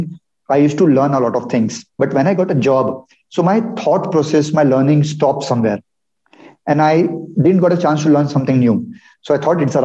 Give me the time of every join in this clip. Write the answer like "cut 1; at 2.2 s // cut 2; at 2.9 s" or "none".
cut 1; at 1.8 s